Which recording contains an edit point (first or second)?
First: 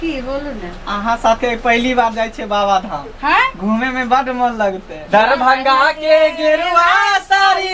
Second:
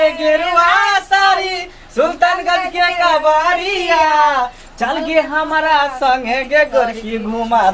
first